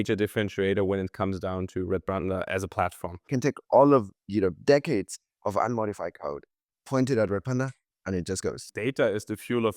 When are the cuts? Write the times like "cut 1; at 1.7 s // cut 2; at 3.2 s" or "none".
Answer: cut 1; at 3.3 s // cut 2; at 8.6 s